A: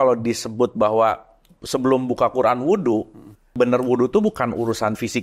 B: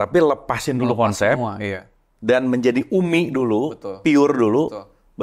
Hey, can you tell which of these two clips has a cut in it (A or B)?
A